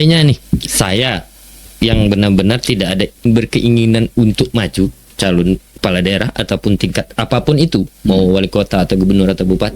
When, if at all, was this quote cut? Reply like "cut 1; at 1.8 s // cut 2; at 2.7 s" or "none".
cut 1; at 3.2 s // cut 2; at 5.8 s